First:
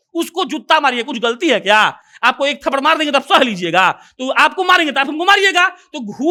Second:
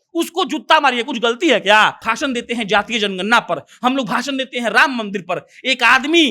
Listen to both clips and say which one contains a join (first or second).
second